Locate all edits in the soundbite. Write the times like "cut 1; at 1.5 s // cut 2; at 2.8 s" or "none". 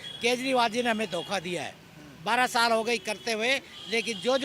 none